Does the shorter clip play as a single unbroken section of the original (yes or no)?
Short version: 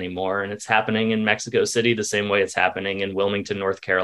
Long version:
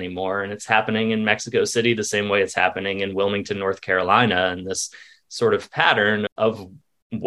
yes